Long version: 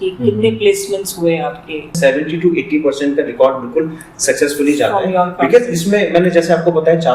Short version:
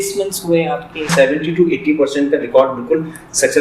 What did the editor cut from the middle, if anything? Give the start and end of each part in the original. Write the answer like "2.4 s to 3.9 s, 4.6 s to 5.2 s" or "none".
1.7 s to 1.8 s